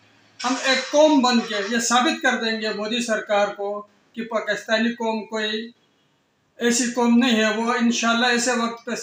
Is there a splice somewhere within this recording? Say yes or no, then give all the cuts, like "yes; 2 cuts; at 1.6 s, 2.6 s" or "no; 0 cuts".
no; 0 cuts